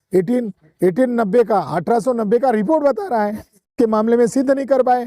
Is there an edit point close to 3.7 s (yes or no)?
yes